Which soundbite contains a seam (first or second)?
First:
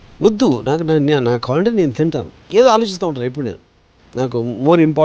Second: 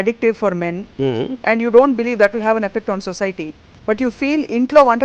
first